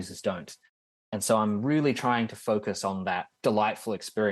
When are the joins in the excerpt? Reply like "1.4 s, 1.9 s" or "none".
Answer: 3.3 s